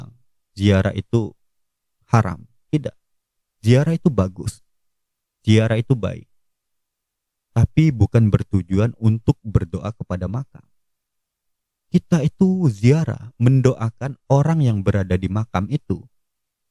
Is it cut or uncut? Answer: uncut